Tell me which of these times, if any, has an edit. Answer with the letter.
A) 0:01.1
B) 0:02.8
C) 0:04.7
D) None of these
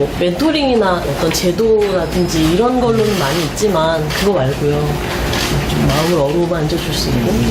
D